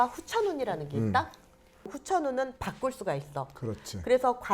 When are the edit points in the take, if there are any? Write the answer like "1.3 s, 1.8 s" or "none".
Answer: 1.9 s